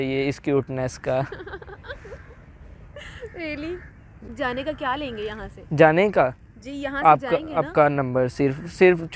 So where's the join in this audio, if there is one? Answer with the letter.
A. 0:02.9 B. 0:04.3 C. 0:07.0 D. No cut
B